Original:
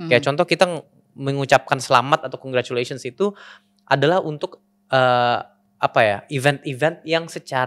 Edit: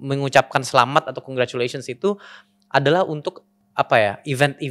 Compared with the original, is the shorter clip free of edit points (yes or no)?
no